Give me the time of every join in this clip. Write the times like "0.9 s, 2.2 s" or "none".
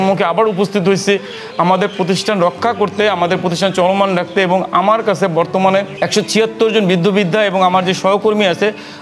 none